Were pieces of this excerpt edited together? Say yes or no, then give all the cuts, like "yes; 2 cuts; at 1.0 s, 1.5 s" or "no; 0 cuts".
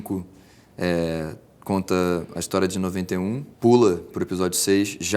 yes; 1 cut; at 3.5 s